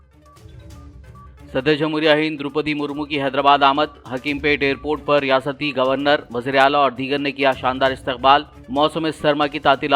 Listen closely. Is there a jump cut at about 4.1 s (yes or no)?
no